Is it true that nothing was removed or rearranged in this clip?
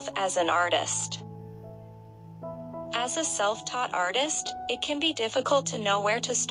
no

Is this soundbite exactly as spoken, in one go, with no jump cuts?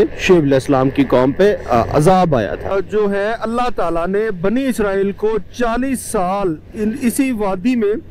no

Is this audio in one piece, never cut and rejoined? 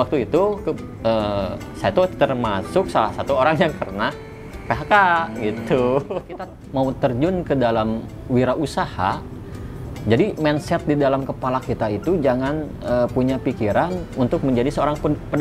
no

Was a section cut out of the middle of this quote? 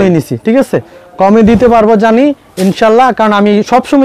no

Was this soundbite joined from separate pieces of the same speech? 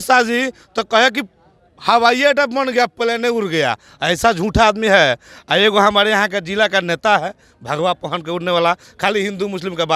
no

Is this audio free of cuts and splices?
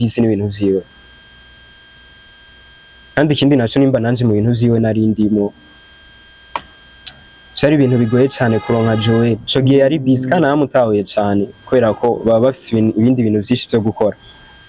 yes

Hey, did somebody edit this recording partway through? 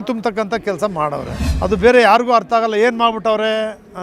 yes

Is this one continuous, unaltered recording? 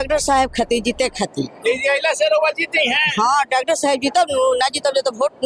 yes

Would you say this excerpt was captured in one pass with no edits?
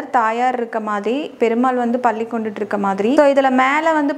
yes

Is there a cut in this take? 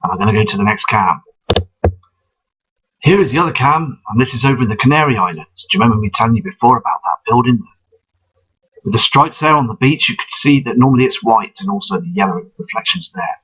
yes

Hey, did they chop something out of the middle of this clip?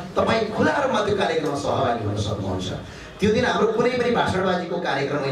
no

